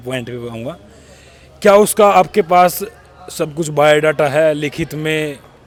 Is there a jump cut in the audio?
no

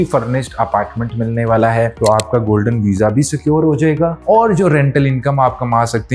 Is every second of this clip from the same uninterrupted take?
no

